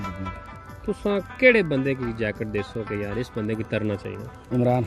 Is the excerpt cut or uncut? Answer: uncut